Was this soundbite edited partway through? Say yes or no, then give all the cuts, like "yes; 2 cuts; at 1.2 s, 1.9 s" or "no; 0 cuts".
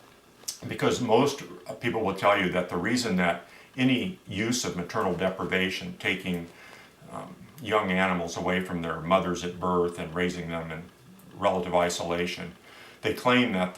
yes; 1 cut; at 8.1 s